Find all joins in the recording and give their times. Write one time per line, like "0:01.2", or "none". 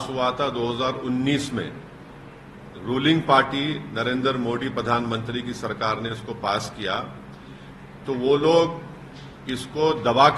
none